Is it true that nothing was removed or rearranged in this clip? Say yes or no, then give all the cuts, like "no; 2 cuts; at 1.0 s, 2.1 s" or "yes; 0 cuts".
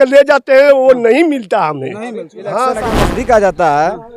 no; 1 cut; at 2.6 s